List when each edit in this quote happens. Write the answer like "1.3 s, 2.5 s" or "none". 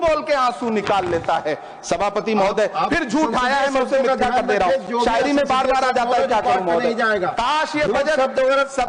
none